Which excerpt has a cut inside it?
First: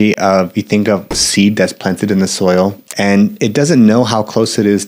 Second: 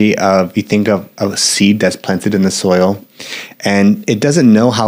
first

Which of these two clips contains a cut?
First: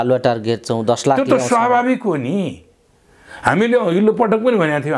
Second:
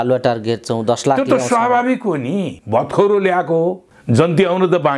second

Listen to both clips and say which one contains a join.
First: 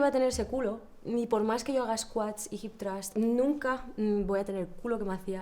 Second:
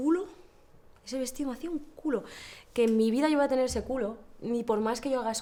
first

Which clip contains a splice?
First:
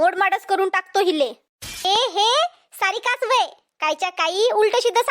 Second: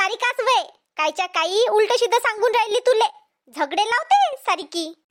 first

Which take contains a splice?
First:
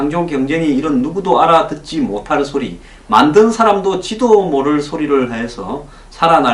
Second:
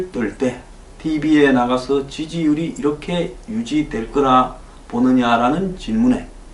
second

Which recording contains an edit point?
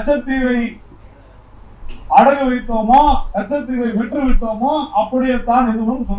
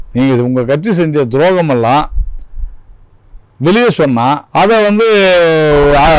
second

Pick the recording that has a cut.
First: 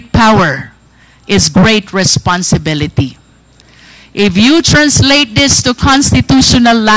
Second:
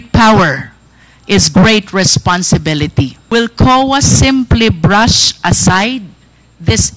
second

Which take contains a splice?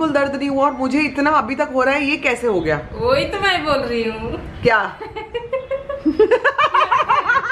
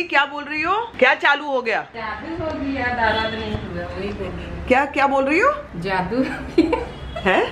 second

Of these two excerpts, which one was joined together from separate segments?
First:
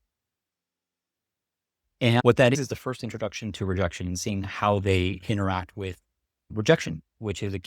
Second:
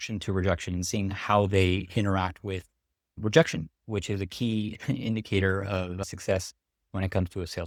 first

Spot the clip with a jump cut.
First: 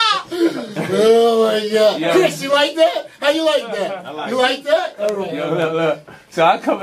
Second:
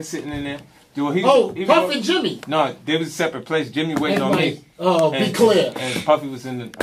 first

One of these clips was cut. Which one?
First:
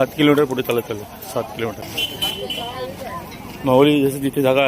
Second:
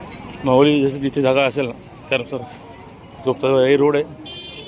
first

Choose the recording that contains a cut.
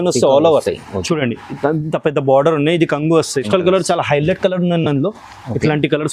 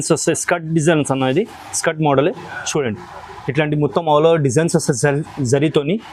first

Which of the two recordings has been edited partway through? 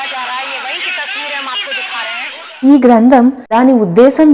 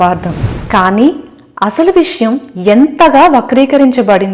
first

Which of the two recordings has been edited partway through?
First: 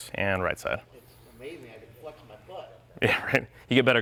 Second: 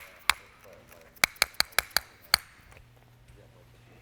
second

